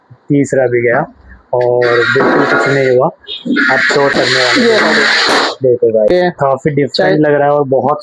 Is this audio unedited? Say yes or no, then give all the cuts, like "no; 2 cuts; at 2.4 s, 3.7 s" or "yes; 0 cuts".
no; 2 cuts; at 4.2 s, 5.9 s